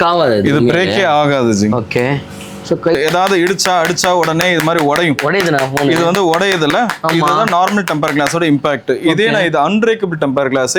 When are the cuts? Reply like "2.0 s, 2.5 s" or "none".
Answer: 2.9 s